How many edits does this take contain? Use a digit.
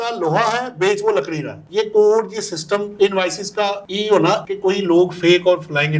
3